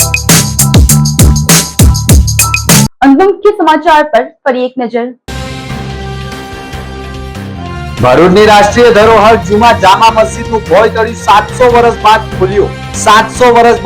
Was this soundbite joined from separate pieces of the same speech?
no; 0 cuts

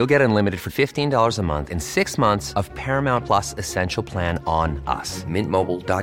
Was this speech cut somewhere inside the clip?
no; 0 cuts

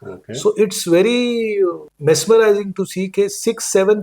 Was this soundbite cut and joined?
yes; 1 cut; at 1.9 s

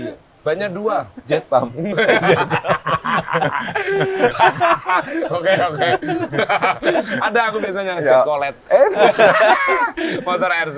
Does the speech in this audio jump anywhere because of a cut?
no; 0 cuts

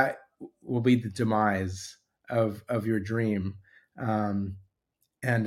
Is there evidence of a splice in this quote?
no; 0 cuts

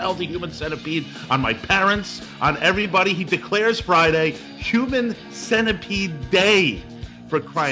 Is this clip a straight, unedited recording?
yes; 0 cuts

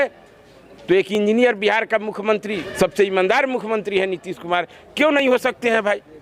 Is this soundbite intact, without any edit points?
no; 1 cut; at 2.6 s

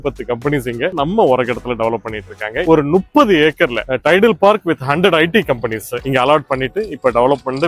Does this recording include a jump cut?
yes; 2 cuts; at 1.0 s, 2.6 s

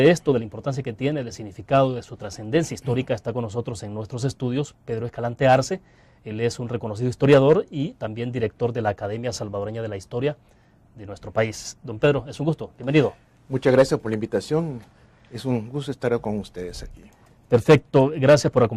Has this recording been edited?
yes; 1 cut; at 14.3 s

